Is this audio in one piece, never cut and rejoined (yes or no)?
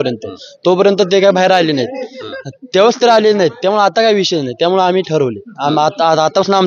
yes